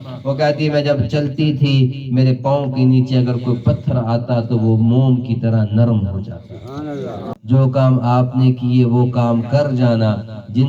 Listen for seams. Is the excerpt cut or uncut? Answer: cut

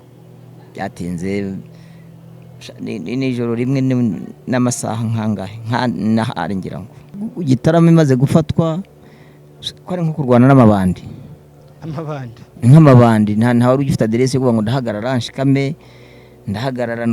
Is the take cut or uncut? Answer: cut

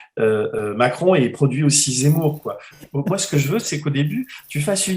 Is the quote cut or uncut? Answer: cut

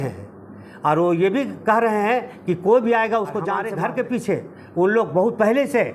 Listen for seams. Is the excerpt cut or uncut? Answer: cut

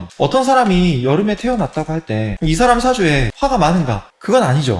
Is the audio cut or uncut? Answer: uncut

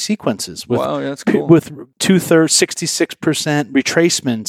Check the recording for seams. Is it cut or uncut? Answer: cut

